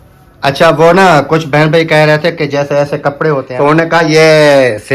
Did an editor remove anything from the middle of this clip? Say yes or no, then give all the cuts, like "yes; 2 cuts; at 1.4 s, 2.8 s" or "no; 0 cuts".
yes; 1 cut; at 3.5 s